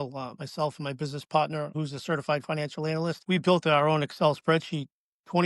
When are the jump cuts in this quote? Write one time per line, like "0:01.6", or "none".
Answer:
0:01.7
0:03.2

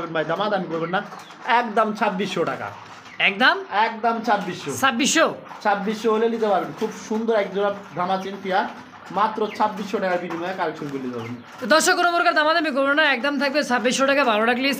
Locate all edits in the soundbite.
none

